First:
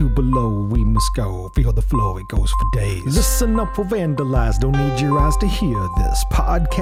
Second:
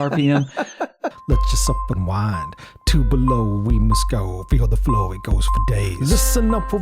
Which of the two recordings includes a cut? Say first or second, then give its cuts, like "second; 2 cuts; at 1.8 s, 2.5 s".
second; 1 cut; at 1.1 s